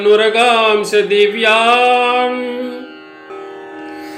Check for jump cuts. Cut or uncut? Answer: uncut